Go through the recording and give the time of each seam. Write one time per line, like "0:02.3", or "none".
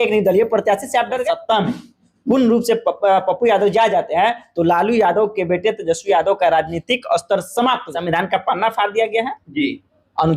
0:01.2
0:07.9